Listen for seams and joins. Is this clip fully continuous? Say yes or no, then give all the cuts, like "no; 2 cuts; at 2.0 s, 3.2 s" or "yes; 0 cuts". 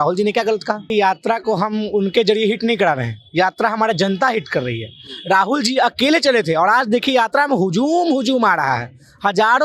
no; 1 cut; at 0.9 s